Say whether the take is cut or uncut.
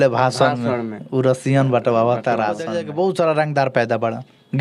cut